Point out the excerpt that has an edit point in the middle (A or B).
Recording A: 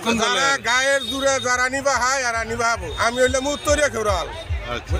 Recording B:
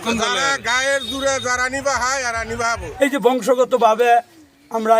B